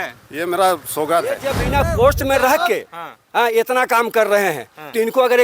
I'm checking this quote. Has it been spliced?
yes; 1 cut; at 1.5 s

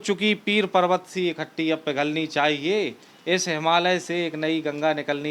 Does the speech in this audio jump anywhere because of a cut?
no; 0 cuts

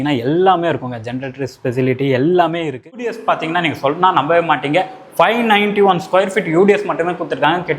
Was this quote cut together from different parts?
yes; 1 cut; at 3.2 s

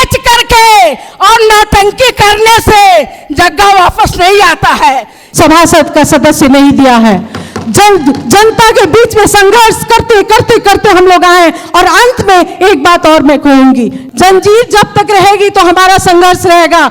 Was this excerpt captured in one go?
no; 2 cuts; at 5.2 s, 14.0 s

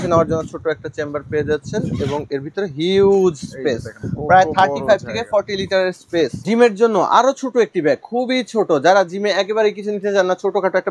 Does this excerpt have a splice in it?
yes; 1 cut; at 6.4 s

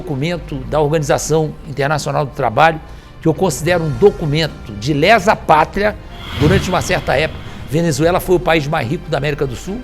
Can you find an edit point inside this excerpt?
yes; 1 cut; at 6.2 s

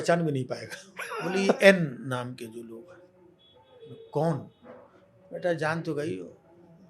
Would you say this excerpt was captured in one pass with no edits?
no; 1 cut; at 1.6 s

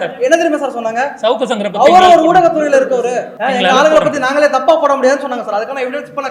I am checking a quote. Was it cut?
yes; 1 cut; at 3.3 s

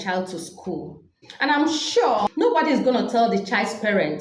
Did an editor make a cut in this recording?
yes; 2 cuts; at 1.2 s, 2.3 s

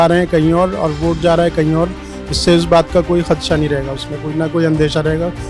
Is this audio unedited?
yes; 0 cuts

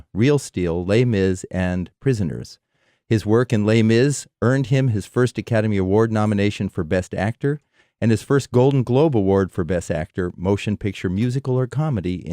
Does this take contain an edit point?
yes; 1 cut; at 3.0 s

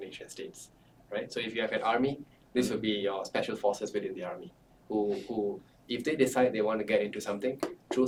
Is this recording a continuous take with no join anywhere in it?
yes; 0 cuts

